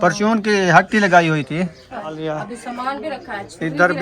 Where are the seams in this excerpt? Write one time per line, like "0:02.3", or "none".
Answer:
0:02.2